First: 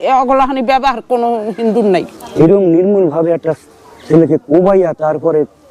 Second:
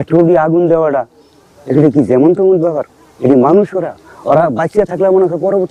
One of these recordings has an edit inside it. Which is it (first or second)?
first